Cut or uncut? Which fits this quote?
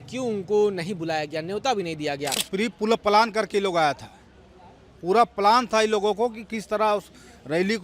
cut